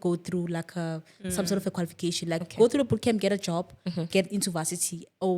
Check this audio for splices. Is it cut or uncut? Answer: uncut